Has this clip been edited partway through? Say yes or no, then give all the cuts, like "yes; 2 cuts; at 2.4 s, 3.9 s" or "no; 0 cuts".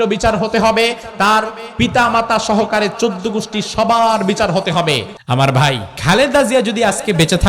yes; 2 cuts; at 5.1 s, 5.9 s